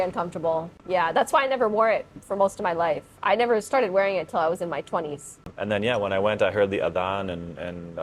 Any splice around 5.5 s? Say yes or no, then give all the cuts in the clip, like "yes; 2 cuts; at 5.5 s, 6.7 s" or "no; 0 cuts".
yes; 1 cut; at 5.5 s